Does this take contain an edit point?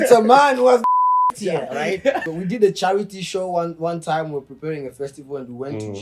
yes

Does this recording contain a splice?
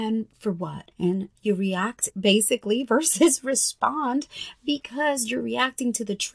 yes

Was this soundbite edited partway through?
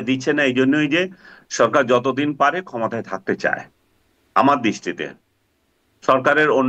no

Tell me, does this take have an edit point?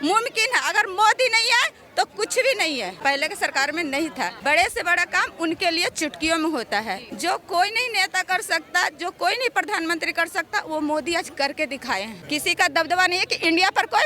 yes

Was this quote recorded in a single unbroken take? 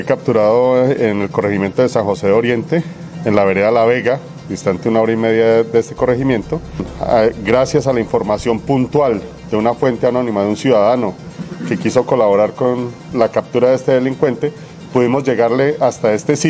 no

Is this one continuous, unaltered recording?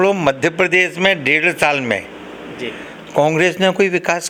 yes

